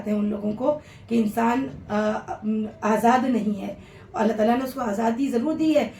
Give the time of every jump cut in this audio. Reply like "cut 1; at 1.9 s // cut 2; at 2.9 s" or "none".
none